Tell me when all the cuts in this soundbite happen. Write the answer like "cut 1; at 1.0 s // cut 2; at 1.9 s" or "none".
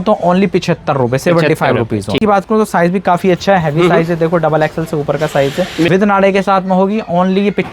cut 1; at 2.2 s // cut 2; at 5.9 s